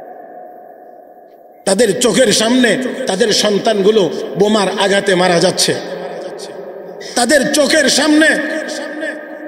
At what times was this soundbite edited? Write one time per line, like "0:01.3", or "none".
0:01.4